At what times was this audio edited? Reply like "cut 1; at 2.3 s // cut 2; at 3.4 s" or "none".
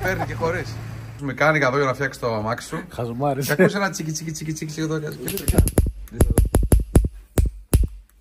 cut 1; at 1.2 s